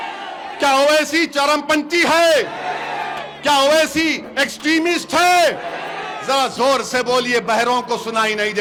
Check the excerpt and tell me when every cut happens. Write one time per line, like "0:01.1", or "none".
none